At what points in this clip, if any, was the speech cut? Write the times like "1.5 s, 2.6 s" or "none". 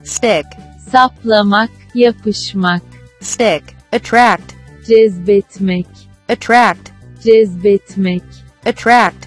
3.7 s, 6.1 s